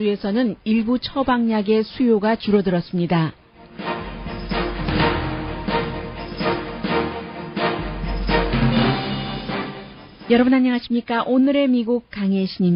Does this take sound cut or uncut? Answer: cut